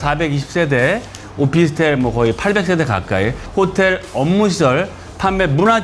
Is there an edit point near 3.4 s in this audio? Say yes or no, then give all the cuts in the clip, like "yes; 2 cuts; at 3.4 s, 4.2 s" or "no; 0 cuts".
yes; 1 cut; at 3.4 s